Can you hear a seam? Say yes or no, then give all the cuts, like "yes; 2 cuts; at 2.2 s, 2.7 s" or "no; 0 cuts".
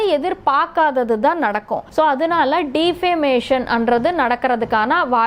yes; 1 cut; at 1.8 s